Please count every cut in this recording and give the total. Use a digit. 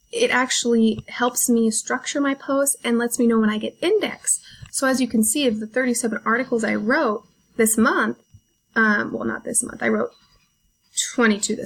0